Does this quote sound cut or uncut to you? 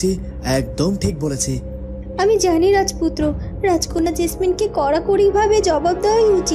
uncut